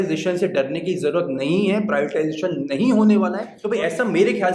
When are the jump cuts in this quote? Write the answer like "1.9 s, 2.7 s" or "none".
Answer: 3.5 s